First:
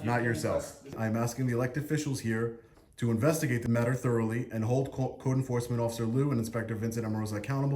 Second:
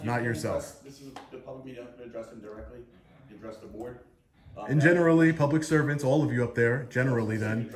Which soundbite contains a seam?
first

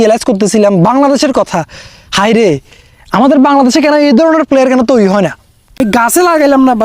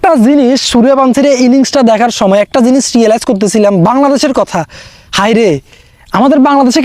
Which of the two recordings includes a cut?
first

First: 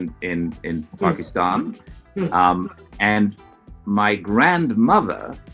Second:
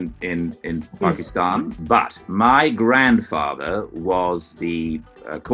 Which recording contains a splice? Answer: second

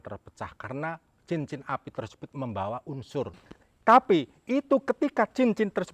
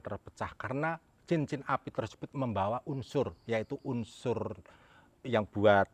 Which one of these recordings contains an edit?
first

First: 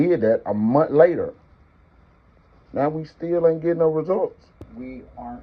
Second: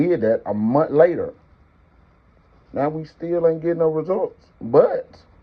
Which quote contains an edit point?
first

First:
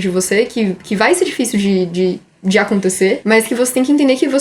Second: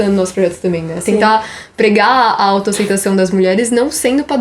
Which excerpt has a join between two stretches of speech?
first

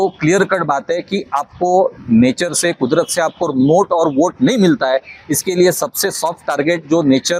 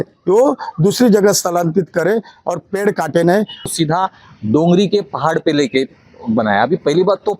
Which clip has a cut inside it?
second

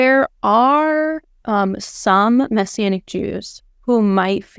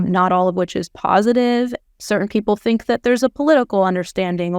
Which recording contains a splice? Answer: second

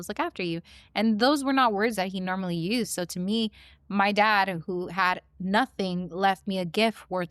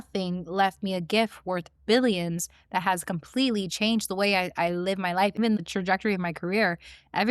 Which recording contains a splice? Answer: second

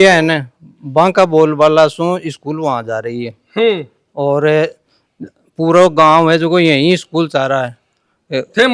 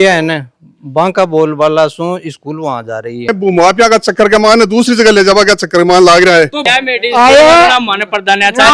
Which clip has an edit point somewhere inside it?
second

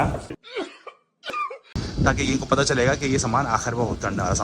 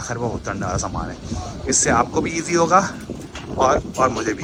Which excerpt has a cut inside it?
first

